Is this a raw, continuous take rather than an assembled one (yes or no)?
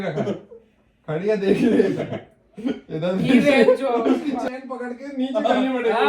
no